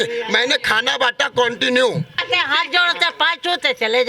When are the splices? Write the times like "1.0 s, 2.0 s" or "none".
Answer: 2.2 s